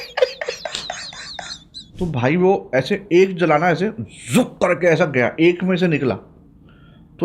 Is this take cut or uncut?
cut